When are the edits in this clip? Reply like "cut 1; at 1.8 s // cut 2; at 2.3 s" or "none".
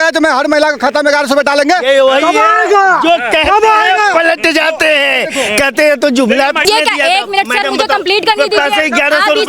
cut 1; at 6.6 s